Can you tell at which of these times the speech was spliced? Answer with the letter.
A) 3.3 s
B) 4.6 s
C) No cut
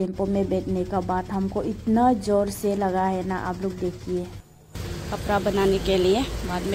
B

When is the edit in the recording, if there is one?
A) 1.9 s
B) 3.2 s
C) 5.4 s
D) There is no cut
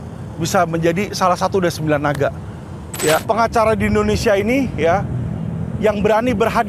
B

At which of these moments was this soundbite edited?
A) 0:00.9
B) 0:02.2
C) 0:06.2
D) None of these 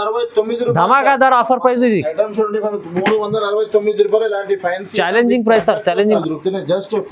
C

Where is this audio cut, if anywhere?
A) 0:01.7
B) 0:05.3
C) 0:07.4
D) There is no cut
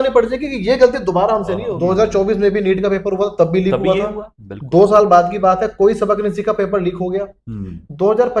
A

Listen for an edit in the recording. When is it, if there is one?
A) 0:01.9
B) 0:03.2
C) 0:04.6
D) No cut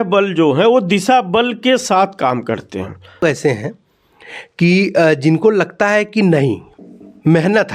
B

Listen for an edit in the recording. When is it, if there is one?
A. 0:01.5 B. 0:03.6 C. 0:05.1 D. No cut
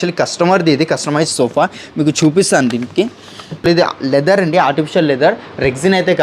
B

